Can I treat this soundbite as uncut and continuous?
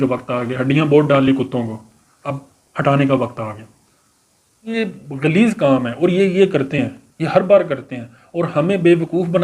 no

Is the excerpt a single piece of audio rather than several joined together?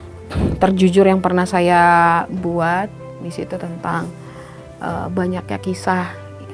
yes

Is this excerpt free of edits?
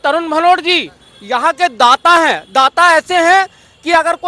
yes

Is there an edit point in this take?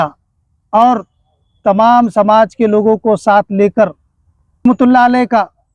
yes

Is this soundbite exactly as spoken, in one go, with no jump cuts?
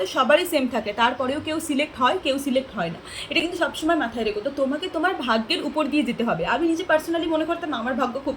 yes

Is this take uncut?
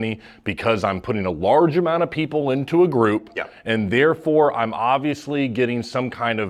yes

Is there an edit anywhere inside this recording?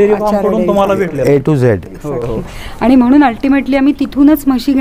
no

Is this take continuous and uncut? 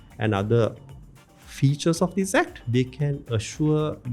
no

